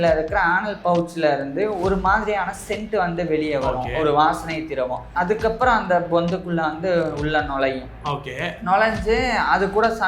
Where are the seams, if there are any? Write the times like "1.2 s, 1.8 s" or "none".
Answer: 5.1 s